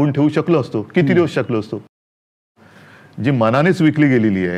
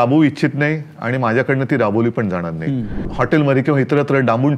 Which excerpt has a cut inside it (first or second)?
second